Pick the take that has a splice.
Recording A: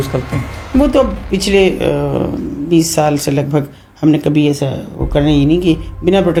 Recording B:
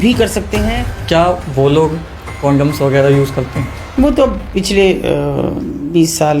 B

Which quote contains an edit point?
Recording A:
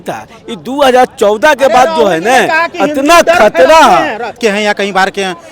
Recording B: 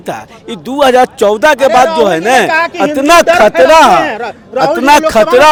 A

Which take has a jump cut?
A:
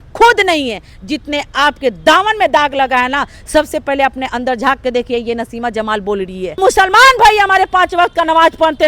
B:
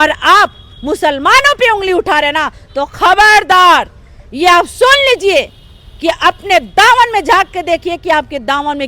A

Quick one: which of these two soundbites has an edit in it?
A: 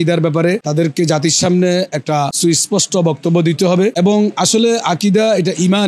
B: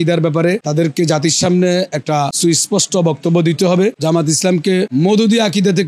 B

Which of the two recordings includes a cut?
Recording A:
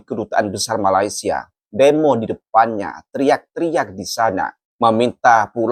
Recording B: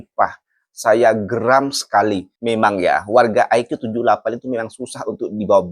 B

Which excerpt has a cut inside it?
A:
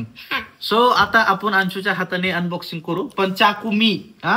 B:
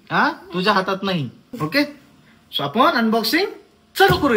B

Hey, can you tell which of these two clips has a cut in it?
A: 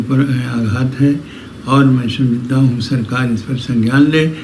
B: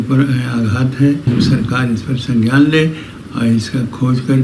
B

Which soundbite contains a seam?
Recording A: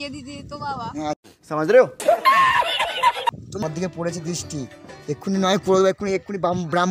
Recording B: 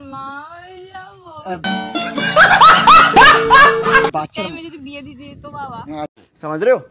A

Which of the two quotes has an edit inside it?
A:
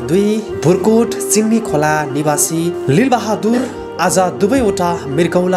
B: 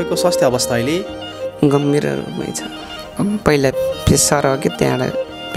B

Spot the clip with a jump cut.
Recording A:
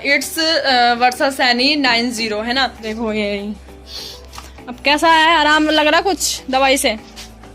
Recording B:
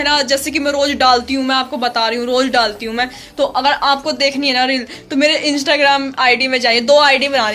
A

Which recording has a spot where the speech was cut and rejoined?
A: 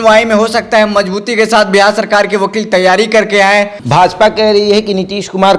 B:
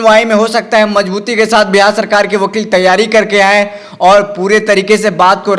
A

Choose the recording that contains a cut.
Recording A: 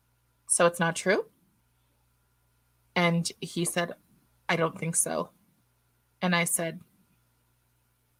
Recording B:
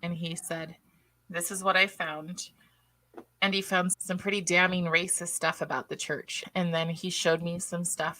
B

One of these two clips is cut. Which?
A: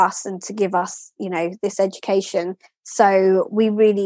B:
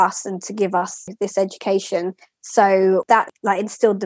B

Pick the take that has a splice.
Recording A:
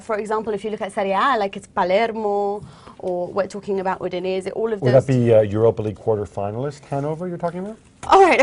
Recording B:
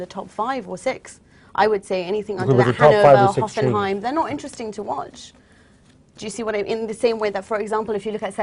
B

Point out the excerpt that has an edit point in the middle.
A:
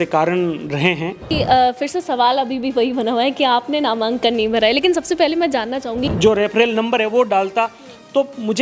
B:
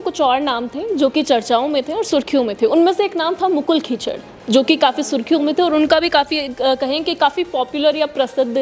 A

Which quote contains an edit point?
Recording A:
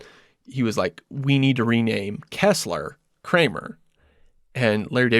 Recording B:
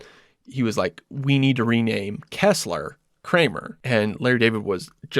B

